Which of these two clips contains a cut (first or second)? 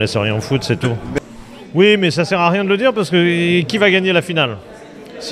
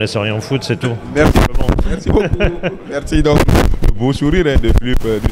first